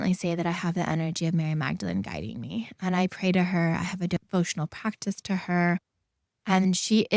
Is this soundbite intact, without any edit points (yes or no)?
no